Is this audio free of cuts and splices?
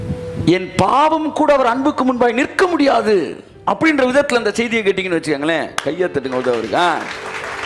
yes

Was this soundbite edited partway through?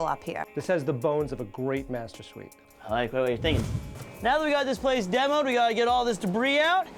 yes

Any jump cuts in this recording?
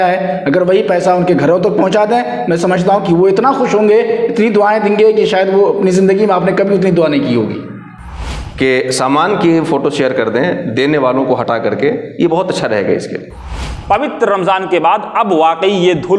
yes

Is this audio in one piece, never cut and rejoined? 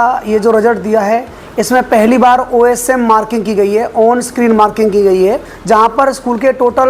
no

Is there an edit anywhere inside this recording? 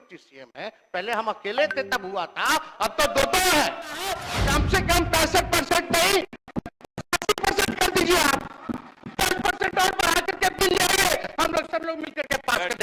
yes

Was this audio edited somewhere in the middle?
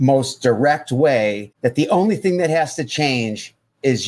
yes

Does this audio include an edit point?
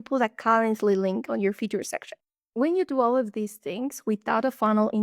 no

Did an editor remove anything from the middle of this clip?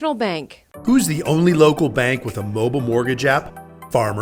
no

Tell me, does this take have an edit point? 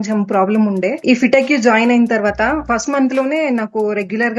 yes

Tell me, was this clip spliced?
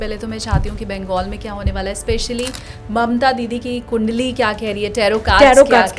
no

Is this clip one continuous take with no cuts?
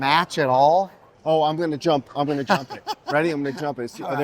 no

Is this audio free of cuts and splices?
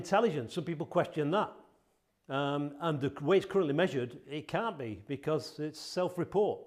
yes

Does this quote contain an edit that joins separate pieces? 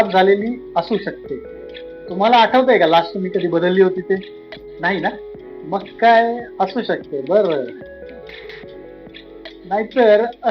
no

